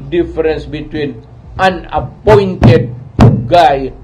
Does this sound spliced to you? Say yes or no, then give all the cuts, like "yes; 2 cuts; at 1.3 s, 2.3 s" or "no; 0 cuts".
no; 0 cuts